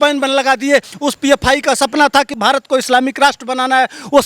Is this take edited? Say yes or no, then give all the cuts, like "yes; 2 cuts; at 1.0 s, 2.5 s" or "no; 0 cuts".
yes; 1 cut; at 0.9 s